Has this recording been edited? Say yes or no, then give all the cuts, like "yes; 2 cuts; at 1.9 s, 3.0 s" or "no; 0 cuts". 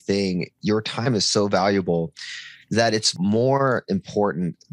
yes; 1 cut; at 3.1 s